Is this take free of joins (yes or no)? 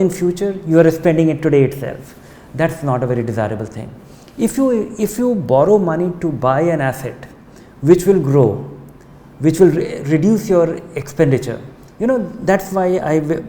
yes